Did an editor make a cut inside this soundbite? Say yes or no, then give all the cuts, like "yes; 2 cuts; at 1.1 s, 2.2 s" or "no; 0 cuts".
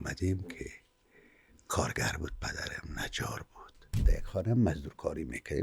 yes; 1 cut; at 4.0 s